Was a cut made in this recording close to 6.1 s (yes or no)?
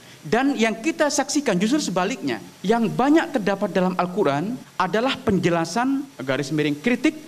yes